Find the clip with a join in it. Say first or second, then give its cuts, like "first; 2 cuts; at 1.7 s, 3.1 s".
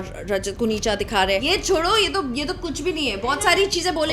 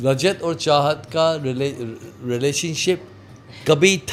first; 1 cut; at 1.4 s